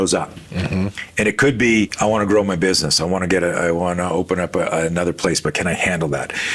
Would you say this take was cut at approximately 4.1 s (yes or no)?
no